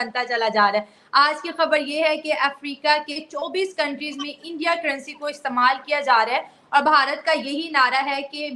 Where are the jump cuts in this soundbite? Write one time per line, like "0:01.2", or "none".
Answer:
none